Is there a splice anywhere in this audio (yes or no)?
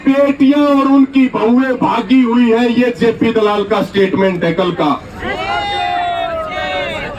no